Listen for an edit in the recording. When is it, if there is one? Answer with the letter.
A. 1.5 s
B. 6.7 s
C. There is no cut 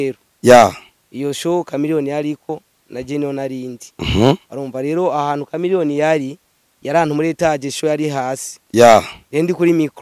C